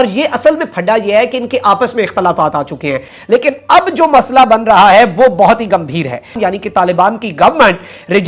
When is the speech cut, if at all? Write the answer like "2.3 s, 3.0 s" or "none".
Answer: 3.1 s, 6.3 s

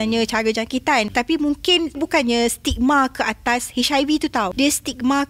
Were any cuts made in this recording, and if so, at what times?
1.1 s, 2.0 s, 4.5 s

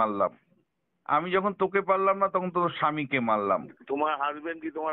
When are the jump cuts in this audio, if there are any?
3.8 s

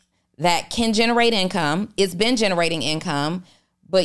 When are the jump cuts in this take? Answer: none

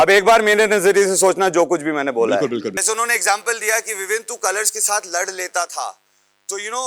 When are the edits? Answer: 2.7 s

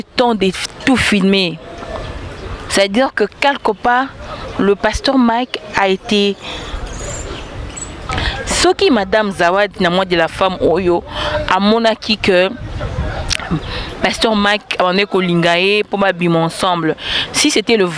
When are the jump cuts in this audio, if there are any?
8.1 s

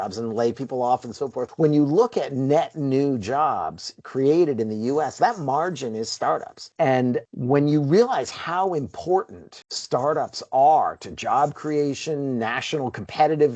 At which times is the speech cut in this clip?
none

